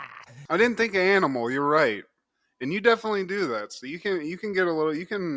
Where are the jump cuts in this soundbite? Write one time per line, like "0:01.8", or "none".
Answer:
none